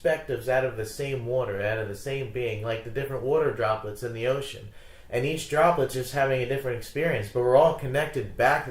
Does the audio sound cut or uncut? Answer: uncut